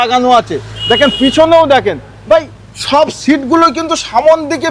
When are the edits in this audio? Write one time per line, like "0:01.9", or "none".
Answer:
none